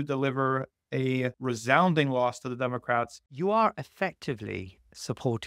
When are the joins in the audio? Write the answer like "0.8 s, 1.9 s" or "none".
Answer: 1.4 s, 3.2 s